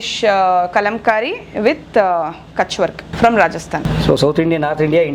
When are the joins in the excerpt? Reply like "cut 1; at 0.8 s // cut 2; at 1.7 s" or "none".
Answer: cut 1; at 3.0 s // cut 2; at 3.8 s